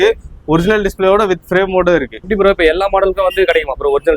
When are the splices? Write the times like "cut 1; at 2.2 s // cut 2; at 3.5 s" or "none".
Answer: cut 1; at 2.3 s